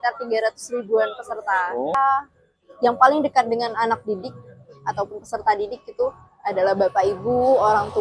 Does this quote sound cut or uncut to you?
cut